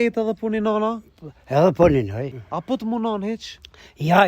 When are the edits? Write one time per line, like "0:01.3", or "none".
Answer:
0:02.4